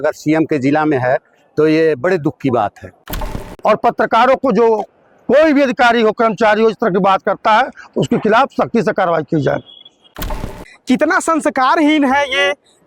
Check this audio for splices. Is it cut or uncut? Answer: cut